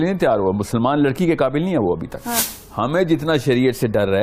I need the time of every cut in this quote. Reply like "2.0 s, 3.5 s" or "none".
2.9 s

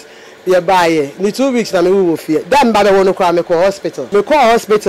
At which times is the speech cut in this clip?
3.9 s

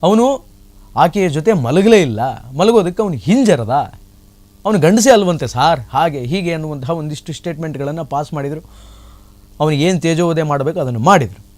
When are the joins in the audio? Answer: none

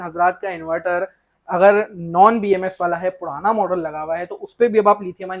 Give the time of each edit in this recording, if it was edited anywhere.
none

